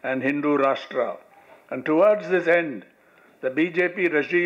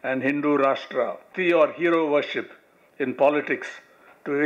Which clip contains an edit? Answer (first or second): second